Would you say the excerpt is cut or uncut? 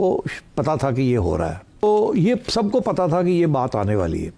uncut